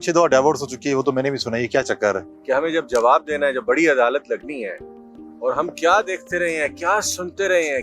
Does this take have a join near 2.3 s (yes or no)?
yes